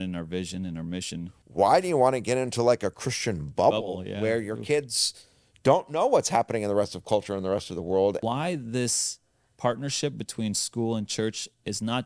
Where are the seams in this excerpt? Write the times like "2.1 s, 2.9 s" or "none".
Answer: 1.4 s, 8.2 s